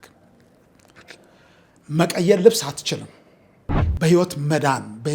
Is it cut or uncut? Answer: cut